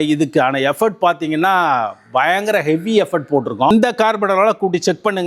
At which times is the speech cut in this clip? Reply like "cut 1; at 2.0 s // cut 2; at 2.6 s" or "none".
cut 1; at 3.7 s